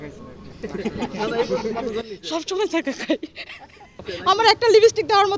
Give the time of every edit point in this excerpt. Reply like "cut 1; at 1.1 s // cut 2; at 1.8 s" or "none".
cut 1; at 4.1 s